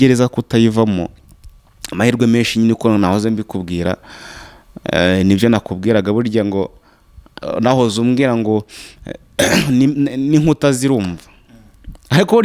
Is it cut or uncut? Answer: uncut